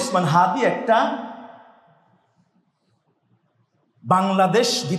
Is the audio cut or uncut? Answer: uncut